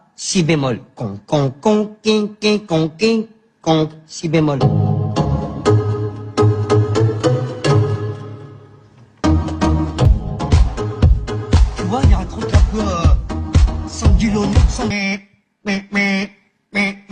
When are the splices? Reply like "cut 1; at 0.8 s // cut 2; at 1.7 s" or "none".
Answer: cut 1; at 9.1 s // cut 2; at 14.9 s